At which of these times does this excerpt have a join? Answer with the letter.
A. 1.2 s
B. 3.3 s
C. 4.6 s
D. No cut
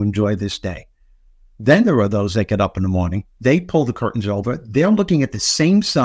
B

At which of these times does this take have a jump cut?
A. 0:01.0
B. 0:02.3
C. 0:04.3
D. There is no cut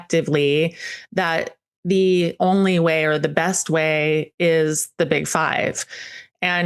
D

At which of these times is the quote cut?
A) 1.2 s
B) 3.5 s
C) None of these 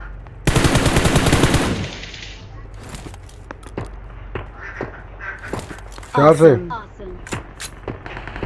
C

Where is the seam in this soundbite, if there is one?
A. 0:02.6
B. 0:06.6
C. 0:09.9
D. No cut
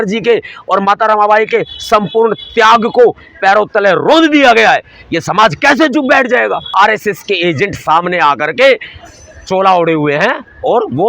B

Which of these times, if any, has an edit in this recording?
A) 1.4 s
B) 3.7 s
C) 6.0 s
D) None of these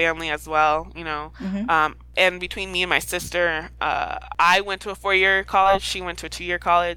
D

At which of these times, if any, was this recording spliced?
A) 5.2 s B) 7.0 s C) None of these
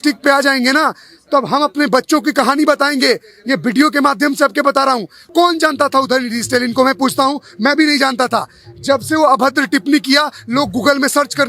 A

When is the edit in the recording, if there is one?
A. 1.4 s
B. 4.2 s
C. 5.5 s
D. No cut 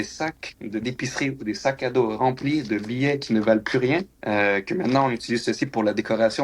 D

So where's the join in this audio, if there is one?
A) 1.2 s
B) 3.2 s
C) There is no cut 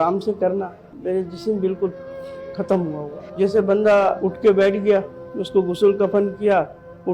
B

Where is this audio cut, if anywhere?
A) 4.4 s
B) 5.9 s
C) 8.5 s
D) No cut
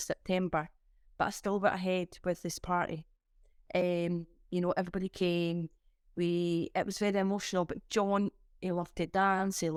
D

